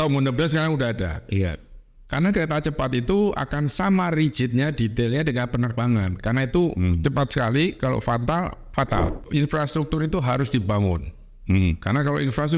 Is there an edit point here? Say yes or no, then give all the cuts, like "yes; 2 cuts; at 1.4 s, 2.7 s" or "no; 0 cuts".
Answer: yes; 1 cut; at 9.2 s